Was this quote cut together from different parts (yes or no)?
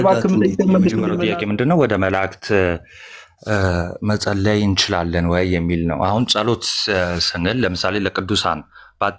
yes